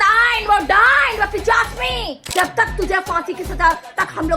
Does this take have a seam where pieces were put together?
yes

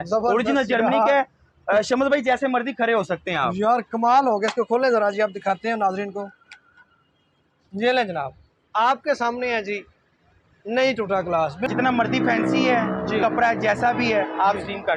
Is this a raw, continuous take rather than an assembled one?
no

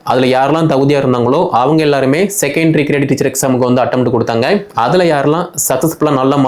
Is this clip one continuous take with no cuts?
yes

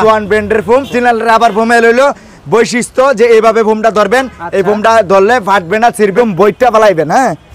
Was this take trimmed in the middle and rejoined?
yes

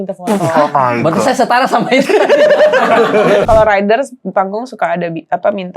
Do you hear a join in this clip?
yes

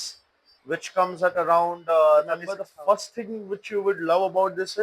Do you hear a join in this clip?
yes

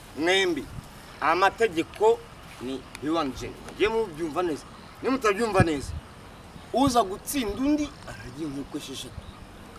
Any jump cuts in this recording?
no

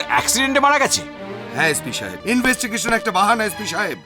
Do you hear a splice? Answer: yes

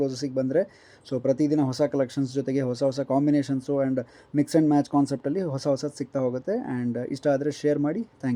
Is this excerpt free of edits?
yes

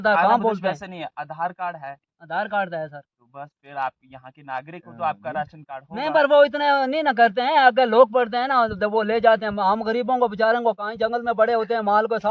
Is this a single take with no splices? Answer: yes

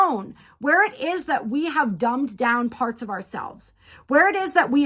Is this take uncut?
yes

